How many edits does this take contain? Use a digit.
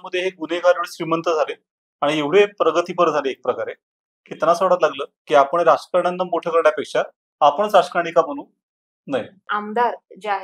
1